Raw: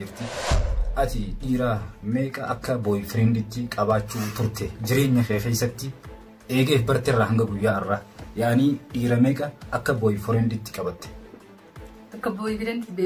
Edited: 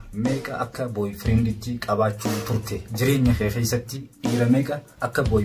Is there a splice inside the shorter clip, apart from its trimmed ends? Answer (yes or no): yes